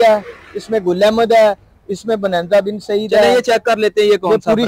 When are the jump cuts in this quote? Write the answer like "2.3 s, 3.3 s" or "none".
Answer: none